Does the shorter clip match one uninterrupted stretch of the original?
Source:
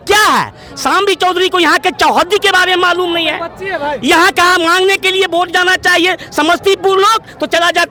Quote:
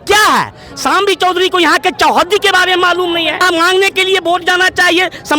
no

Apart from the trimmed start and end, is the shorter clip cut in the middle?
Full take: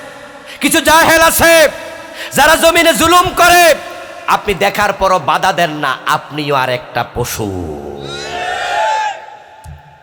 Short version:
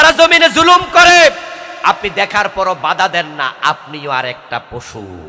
no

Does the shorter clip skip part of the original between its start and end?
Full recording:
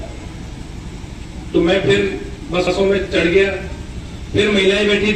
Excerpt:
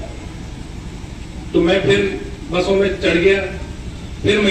yes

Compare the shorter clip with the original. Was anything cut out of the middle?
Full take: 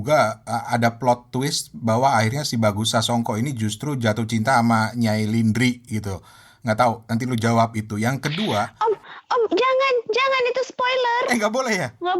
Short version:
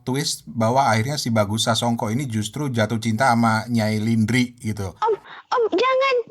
yes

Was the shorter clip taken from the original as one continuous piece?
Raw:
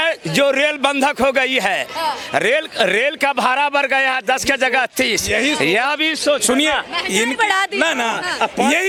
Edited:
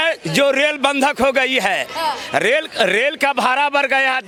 yes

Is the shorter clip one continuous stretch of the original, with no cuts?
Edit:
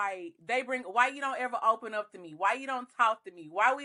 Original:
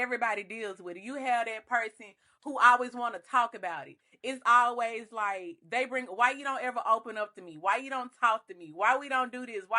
yes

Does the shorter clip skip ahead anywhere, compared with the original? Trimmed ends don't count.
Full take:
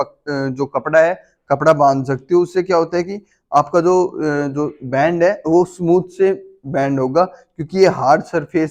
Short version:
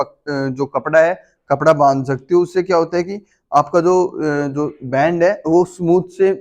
no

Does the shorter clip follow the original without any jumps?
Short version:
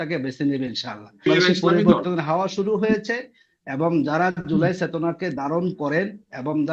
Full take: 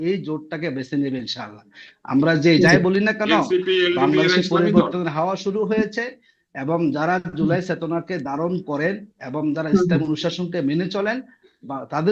no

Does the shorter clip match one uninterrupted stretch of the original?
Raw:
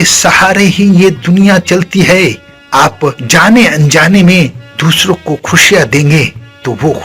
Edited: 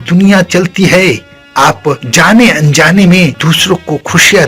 no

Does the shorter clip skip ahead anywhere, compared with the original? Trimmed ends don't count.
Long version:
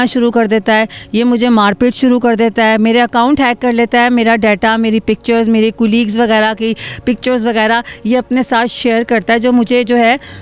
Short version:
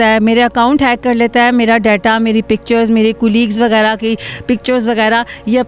no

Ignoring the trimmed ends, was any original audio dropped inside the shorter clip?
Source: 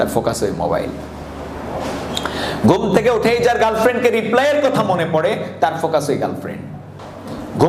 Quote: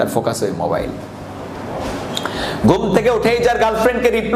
no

